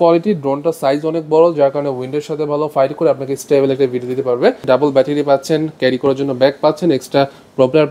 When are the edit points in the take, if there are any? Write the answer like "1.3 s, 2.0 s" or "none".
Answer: 4.6 s